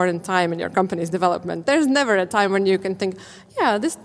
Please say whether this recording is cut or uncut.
cut